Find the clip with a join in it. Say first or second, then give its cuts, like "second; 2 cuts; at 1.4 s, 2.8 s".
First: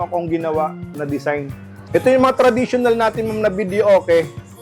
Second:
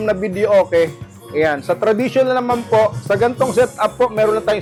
first; 1 cut; at 1.7 s